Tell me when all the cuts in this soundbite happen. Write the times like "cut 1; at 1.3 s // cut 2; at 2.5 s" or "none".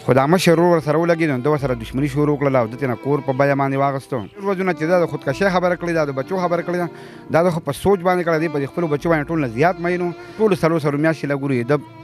cut 1; at 4.4 s // cut 2; at 10.3 s